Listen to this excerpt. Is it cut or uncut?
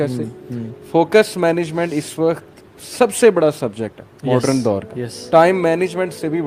uncut